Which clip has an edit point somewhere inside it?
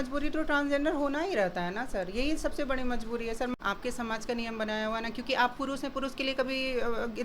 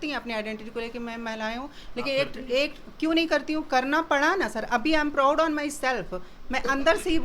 first; 1 cut; at 3.5 s

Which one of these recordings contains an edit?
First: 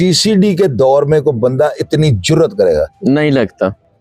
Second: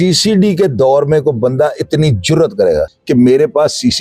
second; 1 cut; at 2.9 s

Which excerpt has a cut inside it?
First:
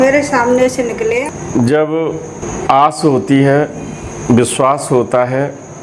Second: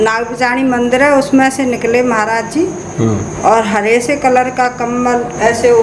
first; 2 cuts; at 1.2 s, 2.4 s

